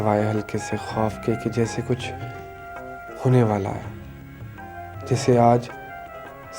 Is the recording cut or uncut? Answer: uncut